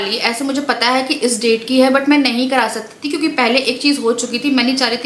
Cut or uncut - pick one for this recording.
uncut